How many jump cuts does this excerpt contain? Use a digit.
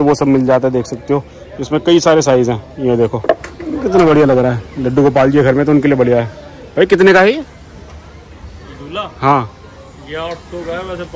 1